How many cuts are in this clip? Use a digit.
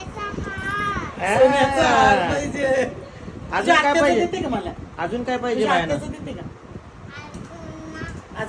0